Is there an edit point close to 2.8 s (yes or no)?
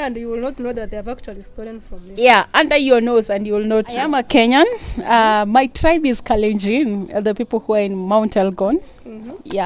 no